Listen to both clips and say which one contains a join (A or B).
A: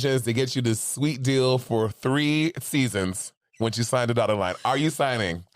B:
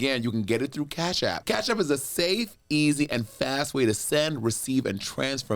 B